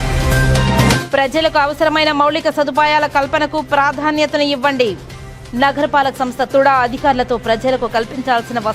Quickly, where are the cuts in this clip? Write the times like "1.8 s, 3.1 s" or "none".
1.0 s